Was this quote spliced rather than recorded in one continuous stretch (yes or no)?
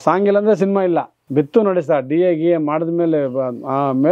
yes